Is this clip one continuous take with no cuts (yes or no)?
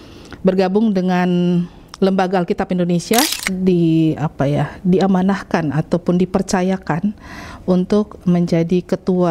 no